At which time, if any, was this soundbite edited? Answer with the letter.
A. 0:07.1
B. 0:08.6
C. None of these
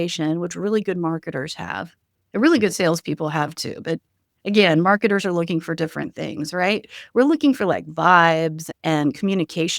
B